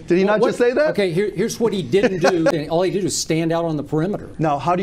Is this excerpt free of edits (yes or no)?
no